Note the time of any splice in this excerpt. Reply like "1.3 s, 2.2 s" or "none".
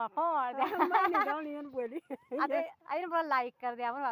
none

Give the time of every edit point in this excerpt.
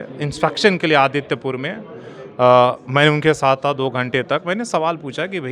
none

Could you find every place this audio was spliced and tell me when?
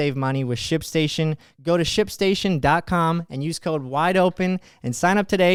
none

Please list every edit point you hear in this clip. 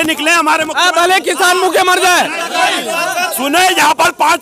none

